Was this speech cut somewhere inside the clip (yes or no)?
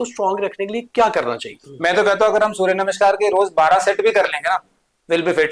yes